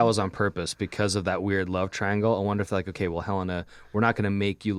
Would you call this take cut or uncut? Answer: uncut